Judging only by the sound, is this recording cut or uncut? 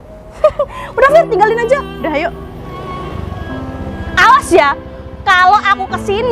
cut